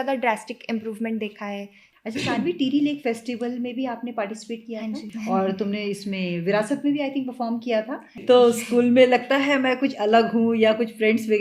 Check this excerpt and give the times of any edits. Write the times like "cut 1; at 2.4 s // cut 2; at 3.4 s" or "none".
cut 1; at 1.8 s // cut 2; at 5.1 s // cut 3; at 8.1 s